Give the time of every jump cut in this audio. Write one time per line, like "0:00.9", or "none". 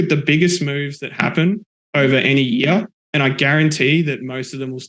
0:01.7

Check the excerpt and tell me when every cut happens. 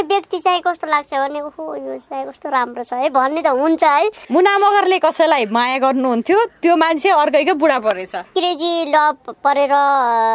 0:04.2
0:08.3

